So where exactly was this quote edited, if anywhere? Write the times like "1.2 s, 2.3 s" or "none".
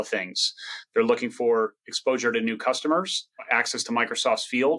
3.5 s